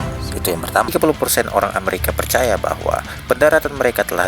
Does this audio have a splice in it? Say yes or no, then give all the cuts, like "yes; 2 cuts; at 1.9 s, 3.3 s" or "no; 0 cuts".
yes; 1 cut; at 0.9 s